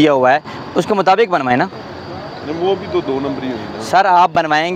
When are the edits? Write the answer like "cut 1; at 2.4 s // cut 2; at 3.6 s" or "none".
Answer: none